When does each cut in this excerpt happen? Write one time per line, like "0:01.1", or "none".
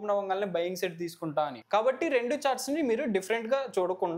0:01.6